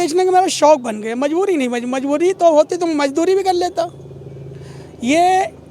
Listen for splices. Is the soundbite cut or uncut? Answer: uncut